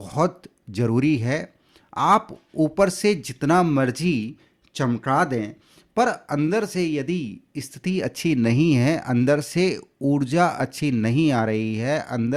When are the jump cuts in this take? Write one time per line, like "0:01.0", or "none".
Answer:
none